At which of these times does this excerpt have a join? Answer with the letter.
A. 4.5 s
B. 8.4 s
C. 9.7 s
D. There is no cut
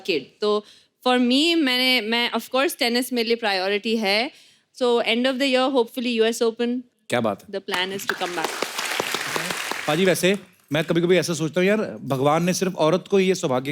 C